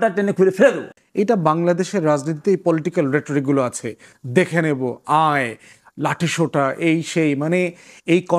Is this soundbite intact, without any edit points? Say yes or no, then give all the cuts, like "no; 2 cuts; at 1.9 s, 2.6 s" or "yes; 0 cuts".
no; 1 cut; at 0.9 s